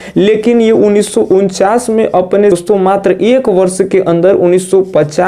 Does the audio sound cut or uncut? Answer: cut